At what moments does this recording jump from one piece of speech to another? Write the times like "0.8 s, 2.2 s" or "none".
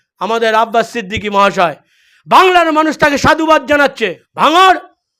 4.2 s